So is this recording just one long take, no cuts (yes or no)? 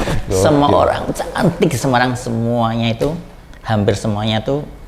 yes